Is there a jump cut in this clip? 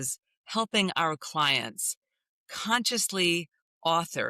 no; 0 cuts

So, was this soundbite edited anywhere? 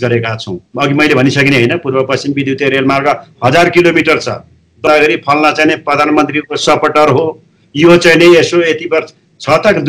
yes; 1 cut; at 4.9 s

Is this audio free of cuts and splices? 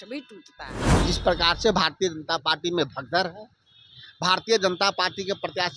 no; 1 cut; at 1.0 s

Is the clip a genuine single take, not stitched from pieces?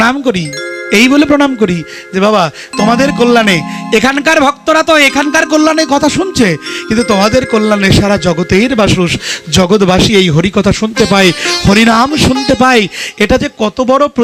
yes; 0 cuts

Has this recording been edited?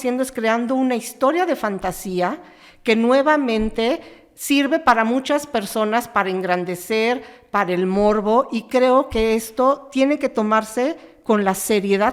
no; 0 cuts

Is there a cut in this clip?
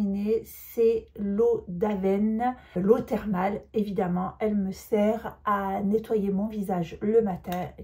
yes; 1 cut; at 2.7 s

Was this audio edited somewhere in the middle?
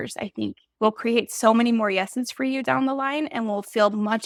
no; 0 cuts

